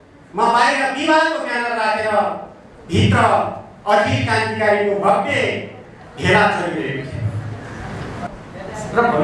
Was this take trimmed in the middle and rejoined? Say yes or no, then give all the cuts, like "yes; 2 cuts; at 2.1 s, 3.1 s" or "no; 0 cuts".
yes; 1 cut; at 8.3 s